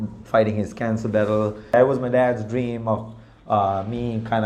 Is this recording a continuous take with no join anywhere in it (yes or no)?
no